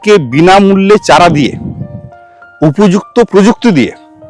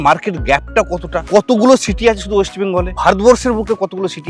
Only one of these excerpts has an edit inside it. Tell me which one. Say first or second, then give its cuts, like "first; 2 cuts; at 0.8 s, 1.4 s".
second; 2 cuts; at 1.2 s, 2.9 s